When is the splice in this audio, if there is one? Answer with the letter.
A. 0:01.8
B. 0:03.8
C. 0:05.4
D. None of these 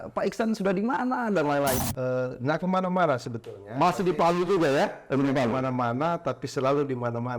A